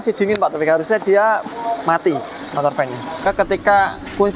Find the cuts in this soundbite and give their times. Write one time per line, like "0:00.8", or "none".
0:03.3